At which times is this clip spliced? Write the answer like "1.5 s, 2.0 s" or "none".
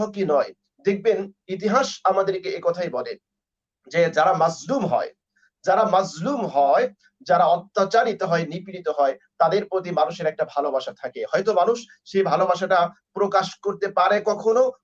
none

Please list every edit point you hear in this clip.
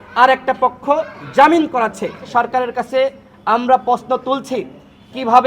2.3 s

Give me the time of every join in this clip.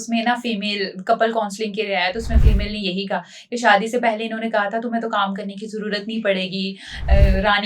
none

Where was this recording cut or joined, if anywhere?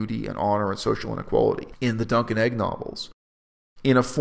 1.7 s

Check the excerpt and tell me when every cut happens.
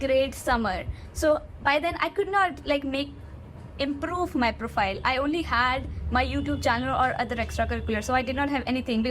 none

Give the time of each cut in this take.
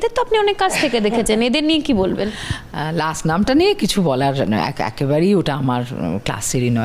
none

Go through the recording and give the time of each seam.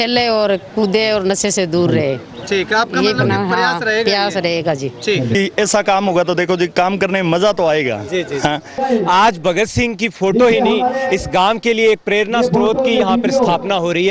5.4 s, 8.8 s

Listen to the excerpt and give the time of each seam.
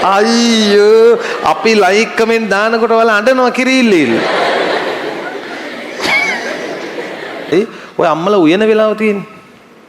7.5 s

